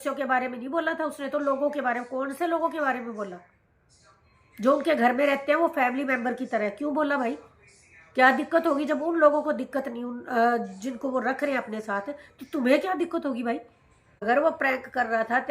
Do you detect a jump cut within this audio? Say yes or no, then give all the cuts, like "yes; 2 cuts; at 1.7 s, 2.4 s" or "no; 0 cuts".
yes; 1 cut; at 14.0 s